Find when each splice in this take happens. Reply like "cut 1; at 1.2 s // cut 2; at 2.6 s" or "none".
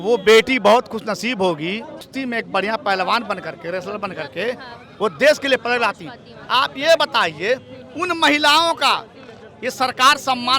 cut 1; at 2.0 s